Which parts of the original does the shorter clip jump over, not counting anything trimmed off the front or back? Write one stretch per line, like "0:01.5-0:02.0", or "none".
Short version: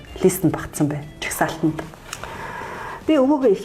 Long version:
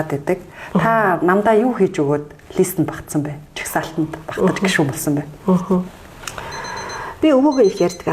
0:04.2-0:06.0